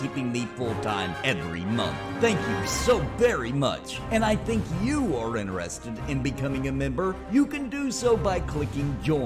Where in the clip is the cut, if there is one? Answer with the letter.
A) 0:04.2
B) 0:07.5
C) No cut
A